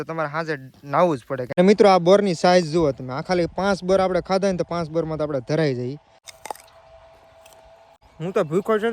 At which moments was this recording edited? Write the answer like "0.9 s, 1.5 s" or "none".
0.8 s, 6.1 s, 8.0 s